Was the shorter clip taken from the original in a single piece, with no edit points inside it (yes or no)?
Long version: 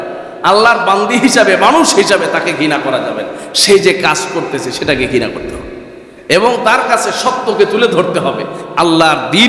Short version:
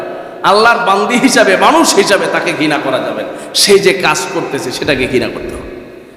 yes